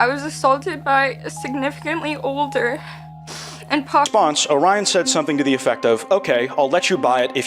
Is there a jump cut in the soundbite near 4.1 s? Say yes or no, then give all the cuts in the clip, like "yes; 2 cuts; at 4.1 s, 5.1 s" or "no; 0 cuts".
yes; 1 cut; at 4.1 s